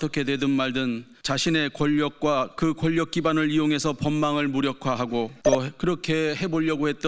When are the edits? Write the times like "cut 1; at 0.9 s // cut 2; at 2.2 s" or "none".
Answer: cut 1; at 1.1 s // cut 2; at 2.6 s // cut 3; at 5.4 s